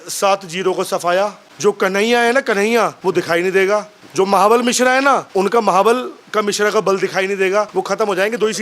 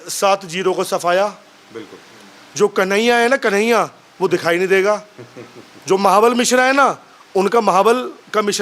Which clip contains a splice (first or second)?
first